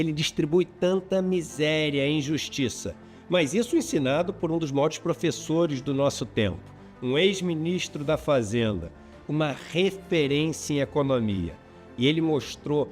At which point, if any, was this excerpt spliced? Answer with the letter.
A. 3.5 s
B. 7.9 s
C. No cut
C